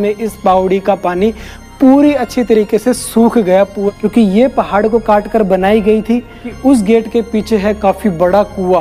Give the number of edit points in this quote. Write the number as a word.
two